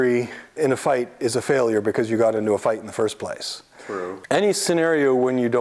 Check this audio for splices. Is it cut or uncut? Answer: uncut